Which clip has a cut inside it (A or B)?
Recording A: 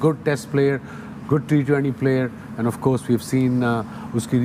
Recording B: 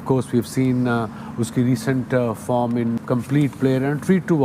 B